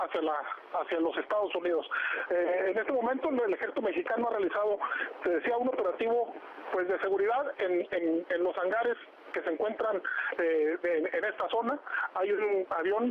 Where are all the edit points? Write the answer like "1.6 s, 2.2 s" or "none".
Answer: 11.7 s